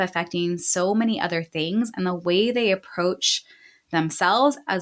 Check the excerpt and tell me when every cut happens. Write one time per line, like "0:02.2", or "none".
none

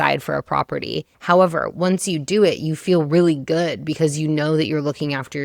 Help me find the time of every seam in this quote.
0:01.1

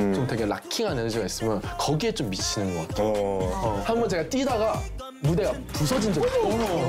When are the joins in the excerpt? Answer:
0:03.8

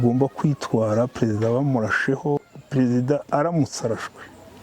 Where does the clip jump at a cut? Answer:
0:02.4

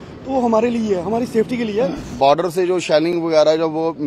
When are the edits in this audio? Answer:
0:02.1

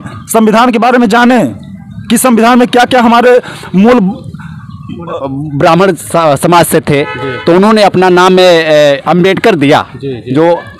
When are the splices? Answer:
0:05.2

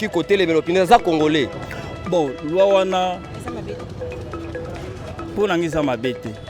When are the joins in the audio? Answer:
0:01.6

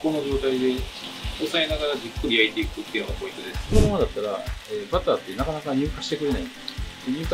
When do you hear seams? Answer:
0:03.7

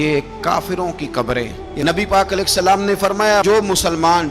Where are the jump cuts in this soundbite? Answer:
0:01.6

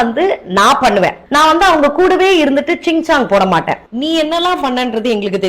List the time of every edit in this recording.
0:01.2
0:03.8

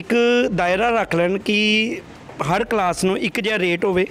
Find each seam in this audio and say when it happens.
none

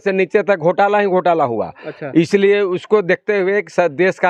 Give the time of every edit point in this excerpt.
none

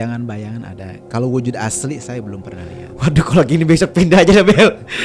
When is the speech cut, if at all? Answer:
none

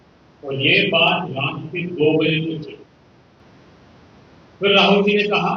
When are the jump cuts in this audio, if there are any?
0:03.4

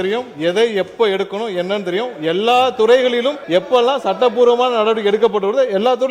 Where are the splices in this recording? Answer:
0:03.4

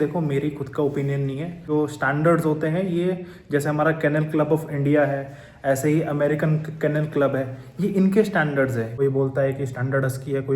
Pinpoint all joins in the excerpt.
0:01.7
0:08.9

